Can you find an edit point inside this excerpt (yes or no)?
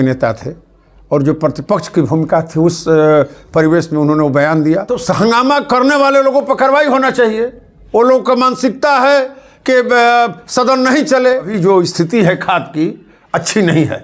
yes